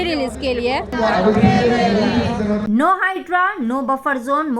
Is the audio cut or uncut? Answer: cut